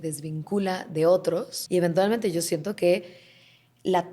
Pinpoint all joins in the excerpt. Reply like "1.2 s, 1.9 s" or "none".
1.5 s

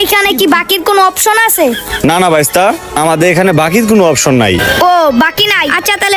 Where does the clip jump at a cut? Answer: none

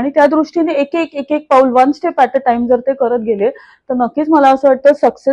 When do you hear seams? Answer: none

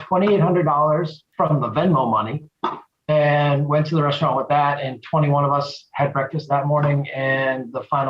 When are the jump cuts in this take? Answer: 1.2 s, 6.4 s

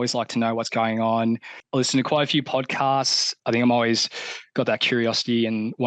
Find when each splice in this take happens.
3.4 s

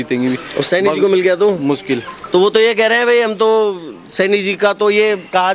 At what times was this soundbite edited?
none

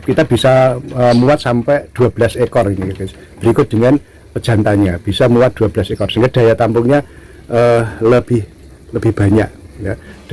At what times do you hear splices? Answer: none

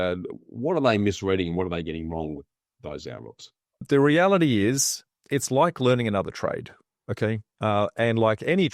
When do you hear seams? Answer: 3.8 s

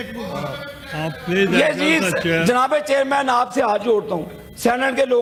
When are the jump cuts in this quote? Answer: none

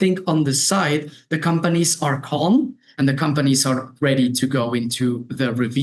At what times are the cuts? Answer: none

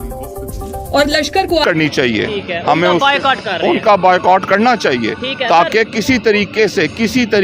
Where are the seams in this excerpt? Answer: 1.6 s

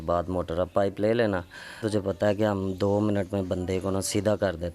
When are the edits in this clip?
1.8 s

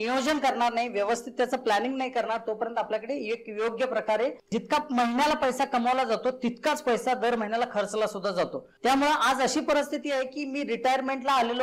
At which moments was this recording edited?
4.4 s, 8.6 s

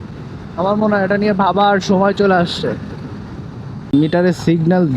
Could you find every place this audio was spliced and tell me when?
3.9 s

